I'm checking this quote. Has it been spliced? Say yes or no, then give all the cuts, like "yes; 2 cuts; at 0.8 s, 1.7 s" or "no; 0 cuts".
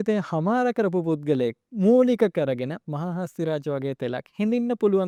no; 0 cuts